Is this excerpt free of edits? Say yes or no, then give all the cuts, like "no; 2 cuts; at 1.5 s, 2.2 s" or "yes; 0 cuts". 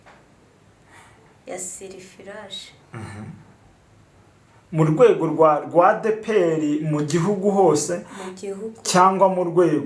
yes; 0 cuts